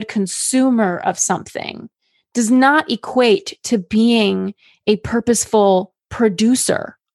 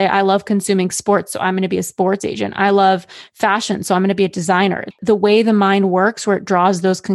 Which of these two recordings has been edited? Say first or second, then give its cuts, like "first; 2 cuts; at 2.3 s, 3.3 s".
second; 1 cut; at 4.9 s